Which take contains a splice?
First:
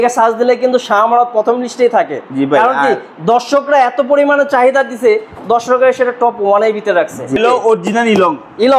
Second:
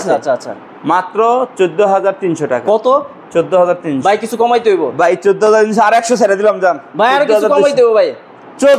first; 1 cut; at 7.4 s

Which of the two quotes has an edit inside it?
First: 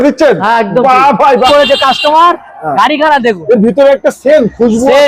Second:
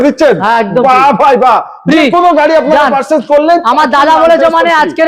first; 1 cut; at 1.5 s

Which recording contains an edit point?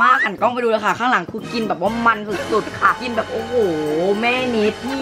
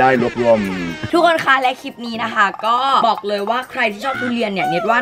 second; 1 cut; at 1.0 s

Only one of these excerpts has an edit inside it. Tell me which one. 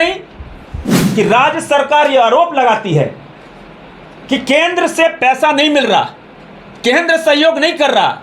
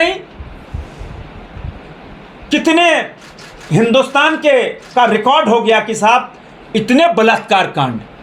first; 1 cut; at 1.0 s

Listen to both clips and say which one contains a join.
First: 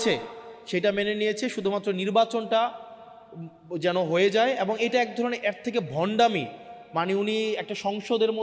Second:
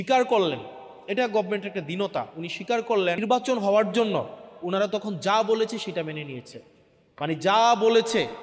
second; 1 cut; at 3.2 s

